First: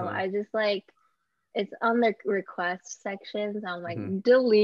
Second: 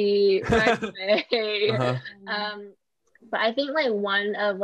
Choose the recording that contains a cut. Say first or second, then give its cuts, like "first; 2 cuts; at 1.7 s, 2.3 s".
second; 1 cut; at 2.5 s